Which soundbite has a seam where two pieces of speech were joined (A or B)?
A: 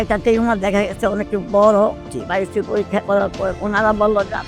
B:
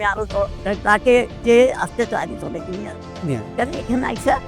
A